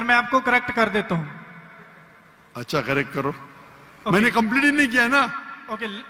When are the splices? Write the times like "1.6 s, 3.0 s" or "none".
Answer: none